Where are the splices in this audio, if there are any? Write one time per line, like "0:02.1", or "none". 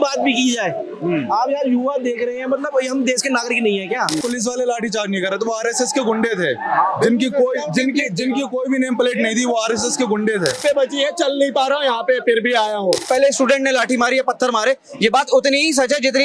0:04.2
0:10.6
0:13.0